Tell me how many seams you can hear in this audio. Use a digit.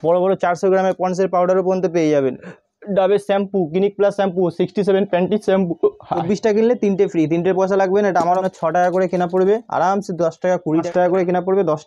3